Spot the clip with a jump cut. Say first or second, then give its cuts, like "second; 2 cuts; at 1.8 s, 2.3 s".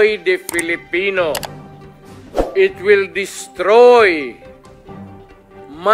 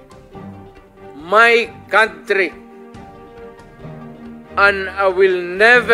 second; 2 cuts; at 2.5 s, 4.6 s